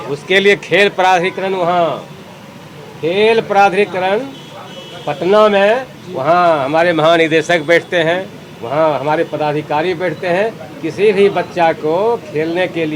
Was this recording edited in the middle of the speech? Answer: no; 0 cuts

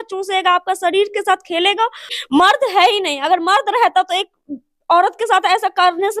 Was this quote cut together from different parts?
yes; 1 cut; at 2.2 s

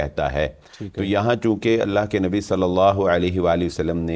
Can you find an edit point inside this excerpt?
no; 0 cuts

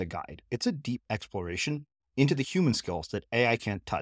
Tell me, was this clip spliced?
no; 0 cuts

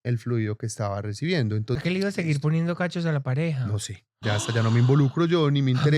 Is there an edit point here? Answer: yes; 1 cut; at 1.8 s

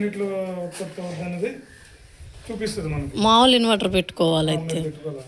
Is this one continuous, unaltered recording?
yes; 0 cuts

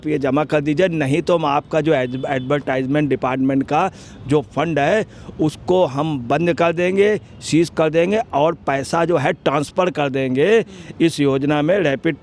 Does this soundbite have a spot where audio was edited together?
no; 0 cuts

